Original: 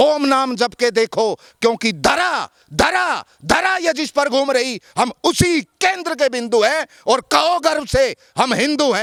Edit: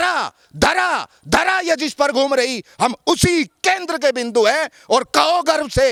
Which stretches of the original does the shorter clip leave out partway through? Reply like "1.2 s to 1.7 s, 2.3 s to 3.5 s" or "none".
none

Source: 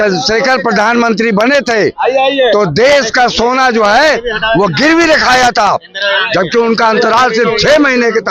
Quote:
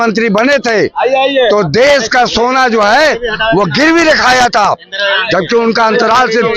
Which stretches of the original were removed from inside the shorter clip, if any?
none

